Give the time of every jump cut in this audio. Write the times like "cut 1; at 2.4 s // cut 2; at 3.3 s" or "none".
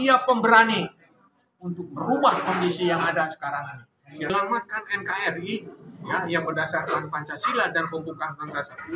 cut 1; at 4.3 s